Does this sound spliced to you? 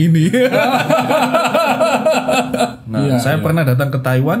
yes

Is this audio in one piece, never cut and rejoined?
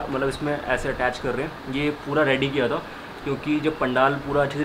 yes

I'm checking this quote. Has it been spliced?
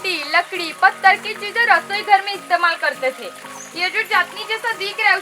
no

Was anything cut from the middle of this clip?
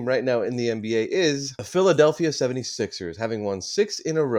yes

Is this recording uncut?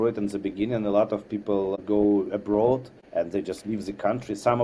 no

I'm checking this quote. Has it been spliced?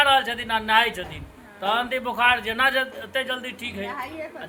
no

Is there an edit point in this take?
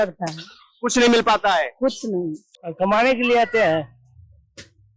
yes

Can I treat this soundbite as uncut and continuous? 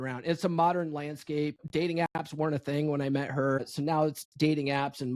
no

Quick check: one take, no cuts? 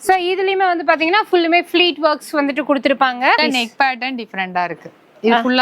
no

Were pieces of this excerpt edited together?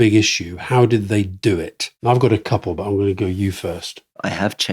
no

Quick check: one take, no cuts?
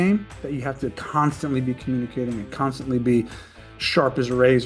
yes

